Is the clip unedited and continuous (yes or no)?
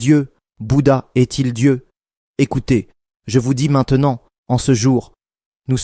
no